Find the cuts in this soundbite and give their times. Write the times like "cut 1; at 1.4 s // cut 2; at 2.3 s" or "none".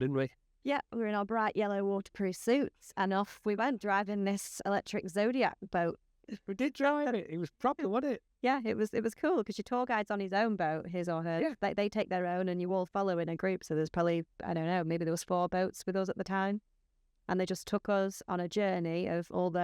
none